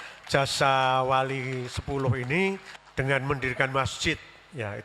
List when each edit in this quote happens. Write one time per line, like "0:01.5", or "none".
0:02.8